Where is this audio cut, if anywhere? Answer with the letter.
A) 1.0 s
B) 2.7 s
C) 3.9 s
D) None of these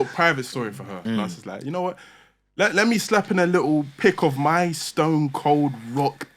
A